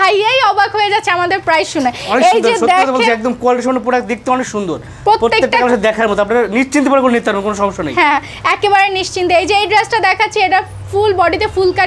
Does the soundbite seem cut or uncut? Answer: uncut